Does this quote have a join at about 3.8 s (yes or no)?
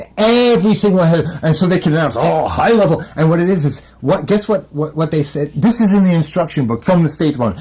no